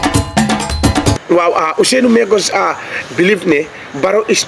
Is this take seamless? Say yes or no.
no